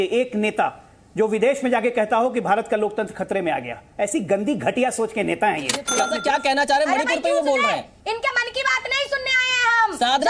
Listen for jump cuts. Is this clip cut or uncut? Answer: cut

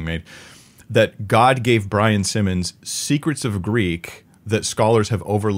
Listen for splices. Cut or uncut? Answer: uncut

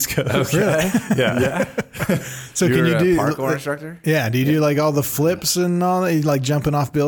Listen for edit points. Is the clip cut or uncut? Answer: uncut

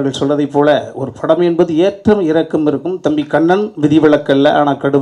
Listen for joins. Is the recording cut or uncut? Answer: uncut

